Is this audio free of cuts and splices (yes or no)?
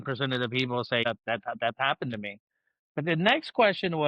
no